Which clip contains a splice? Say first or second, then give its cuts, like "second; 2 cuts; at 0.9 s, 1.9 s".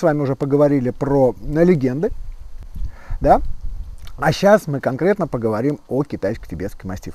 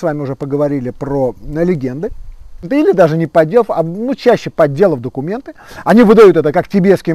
second; 1 cut; at 2.6 s